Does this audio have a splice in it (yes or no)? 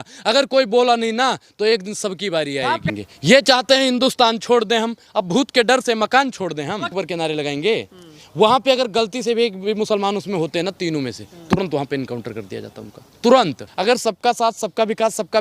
yes